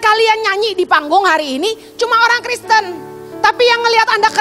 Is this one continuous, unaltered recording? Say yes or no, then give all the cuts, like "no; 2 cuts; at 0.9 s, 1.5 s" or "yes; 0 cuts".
yes; 0 cuts